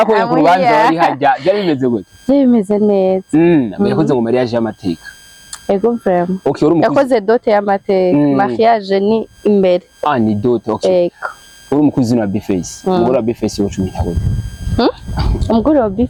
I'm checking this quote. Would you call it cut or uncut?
uncut